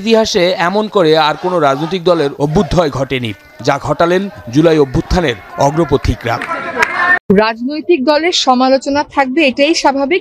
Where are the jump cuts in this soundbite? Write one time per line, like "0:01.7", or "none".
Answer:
0:07.2